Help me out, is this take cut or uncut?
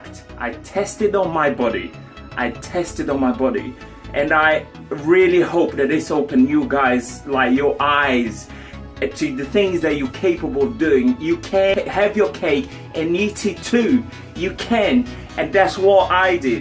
uncut